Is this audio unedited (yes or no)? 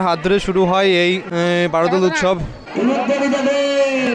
yes